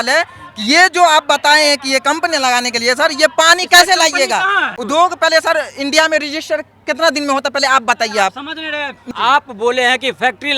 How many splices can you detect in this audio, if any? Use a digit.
2